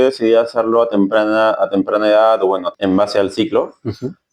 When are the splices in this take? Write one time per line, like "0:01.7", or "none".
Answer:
0:02.7